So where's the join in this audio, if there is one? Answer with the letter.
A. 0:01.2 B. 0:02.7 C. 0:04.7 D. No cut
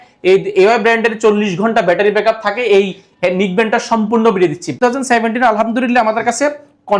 C